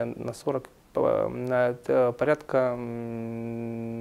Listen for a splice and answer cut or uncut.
uncut